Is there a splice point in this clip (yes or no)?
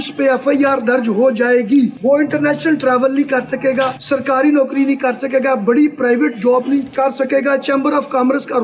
yes